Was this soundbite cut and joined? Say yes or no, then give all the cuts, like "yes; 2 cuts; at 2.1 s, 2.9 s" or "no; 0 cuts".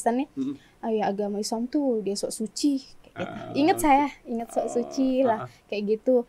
no; 0 cuts